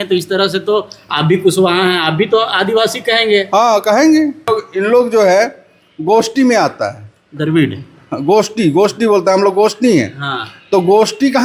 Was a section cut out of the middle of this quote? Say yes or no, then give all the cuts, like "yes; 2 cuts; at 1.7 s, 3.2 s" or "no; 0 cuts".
yes; 1 cut; at 4.5 s